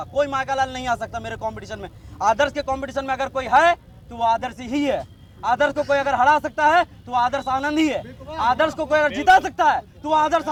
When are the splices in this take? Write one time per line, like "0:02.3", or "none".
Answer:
none